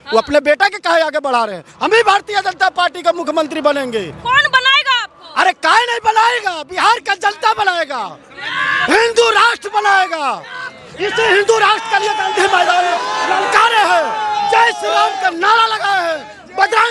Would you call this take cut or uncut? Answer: uncut